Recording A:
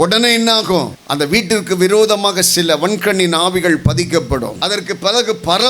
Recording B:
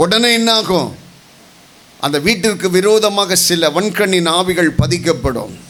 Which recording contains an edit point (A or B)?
A